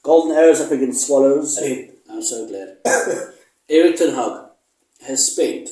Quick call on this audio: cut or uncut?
cut